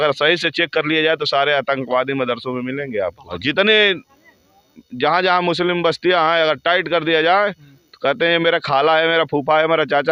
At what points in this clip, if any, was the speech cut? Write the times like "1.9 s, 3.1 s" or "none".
none